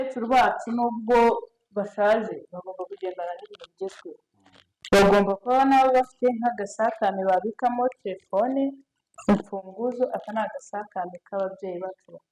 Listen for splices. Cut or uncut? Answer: uncut